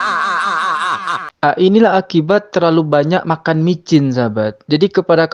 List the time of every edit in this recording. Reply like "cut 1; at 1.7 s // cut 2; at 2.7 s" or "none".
none